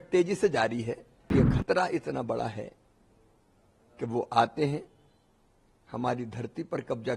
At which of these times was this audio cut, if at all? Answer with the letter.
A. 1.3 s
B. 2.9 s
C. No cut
A